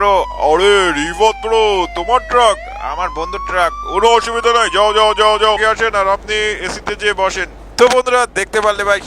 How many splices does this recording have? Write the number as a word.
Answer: one